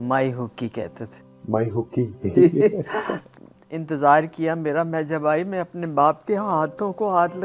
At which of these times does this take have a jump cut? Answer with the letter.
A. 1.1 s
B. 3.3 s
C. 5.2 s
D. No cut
B